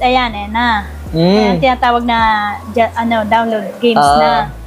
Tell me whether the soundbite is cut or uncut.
uncut